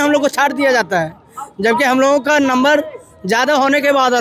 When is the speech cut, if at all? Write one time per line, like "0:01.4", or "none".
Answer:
none

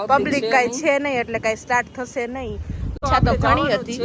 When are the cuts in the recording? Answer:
0:03.0

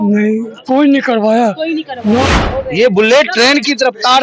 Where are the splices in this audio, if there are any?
0:02.4

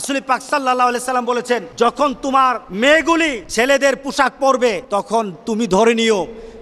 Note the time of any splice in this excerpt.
0:01.7
0:02.7
0:03.4
0:04.8

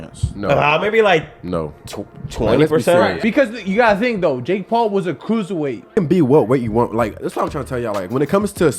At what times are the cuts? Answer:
0:03.2
0:05.9

